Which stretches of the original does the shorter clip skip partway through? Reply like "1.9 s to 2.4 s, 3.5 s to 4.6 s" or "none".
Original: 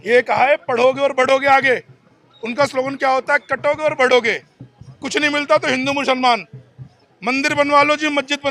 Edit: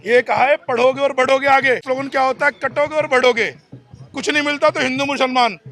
1.8 s to 2.7 s